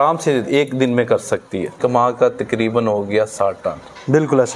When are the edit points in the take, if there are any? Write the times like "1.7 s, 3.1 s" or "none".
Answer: 1.8 s